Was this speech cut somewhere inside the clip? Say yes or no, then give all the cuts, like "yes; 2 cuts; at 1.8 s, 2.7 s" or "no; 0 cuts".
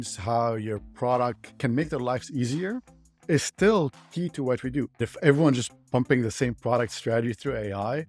yes; 2 cuts; at 1.5 s, 5.0 s